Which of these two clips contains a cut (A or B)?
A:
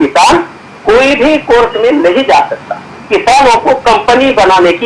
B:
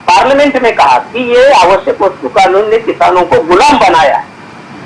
A